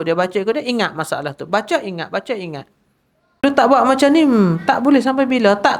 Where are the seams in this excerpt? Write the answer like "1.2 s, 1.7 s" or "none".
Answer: 3.4 s